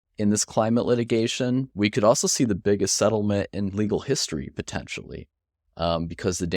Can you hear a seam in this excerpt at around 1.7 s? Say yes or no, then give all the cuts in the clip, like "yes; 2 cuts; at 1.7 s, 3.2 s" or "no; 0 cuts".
yes; 1 cut; at 1.7 s